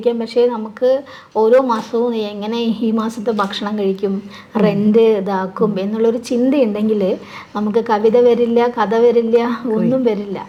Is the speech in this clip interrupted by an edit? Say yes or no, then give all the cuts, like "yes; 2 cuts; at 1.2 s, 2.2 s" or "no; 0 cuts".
no; 0 cuts